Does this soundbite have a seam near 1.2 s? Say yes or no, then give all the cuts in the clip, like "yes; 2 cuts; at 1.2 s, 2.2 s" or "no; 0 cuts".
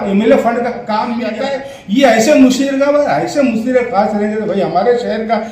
yes; 1 cut; at 1.2 s